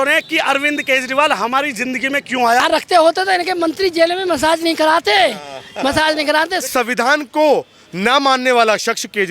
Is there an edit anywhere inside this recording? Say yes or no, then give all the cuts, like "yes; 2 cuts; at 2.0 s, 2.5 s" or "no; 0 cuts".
yes; 2 cuts; at 2.6 s, 6.7 s